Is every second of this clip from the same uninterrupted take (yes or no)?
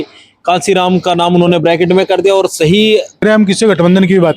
no